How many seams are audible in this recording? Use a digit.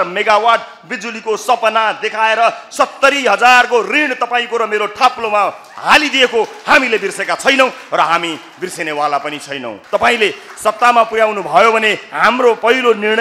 1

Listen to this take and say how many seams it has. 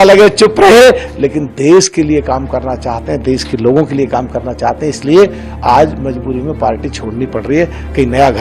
0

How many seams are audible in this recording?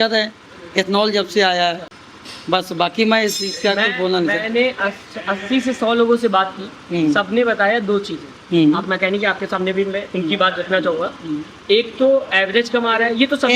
0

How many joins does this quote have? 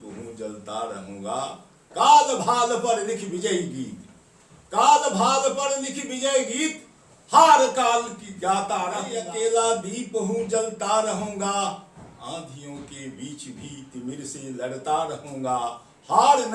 1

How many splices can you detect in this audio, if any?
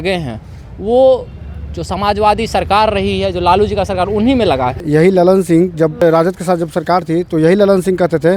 2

